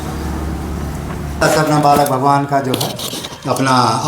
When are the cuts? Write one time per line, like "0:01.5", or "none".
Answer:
0:01.4